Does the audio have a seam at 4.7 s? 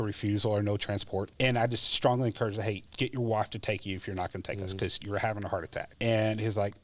no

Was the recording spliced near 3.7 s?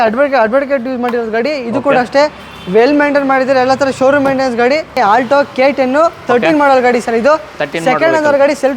no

